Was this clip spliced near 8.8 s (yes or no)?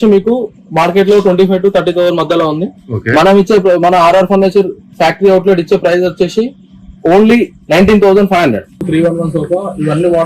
yes